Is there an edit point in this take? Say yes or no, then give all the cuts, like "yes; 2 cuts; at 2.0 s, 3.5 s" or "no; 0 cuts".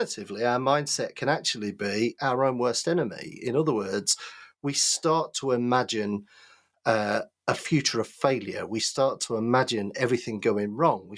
no; 0 cuts